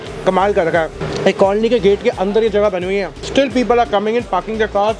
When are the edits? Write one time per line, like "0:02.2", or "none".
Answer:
0:01.0
0:03.2

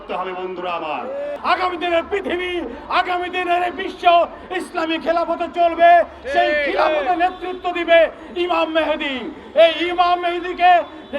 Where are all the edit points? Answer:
0:01.4

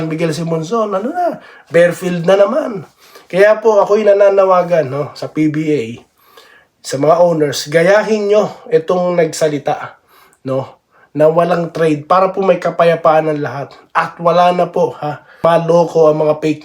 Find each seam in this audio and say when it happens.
0:15.4

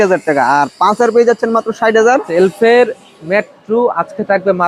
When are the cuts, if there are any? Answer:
0:02.3

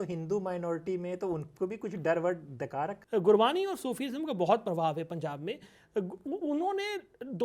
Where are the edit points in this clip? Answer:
0:03.0

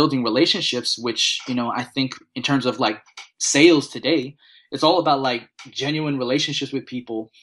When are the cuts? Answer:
none

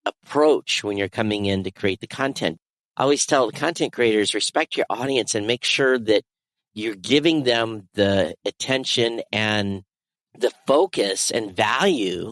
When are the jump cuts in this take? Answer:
0:02.6

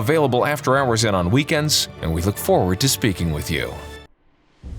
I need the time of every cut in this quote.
0:03.8

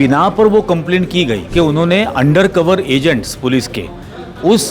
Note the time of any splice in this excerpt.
0:01.4

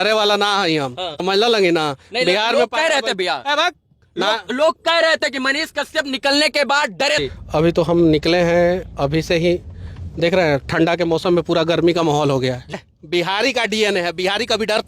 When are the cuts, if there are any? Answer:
0:01.1
0:07.2
0:12.7

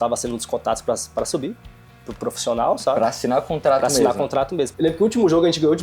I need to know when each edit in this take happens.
0:04.7

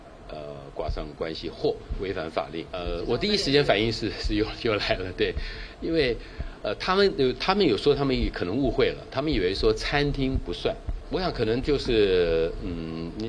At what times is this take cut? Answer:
0:02.8
0:10.9

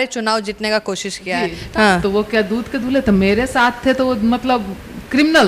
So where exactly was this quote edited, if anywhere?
0:01.6

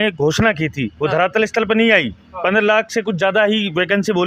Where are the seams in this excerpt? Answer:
none

